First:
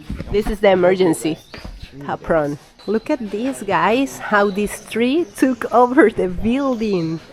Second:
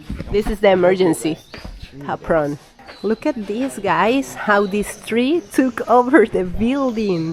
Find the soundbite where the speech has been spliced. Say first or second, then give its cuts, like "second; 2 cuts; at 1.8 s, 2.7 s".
first; 1 cut; at 2.7 s